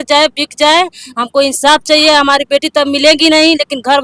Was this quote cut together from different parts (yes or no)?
no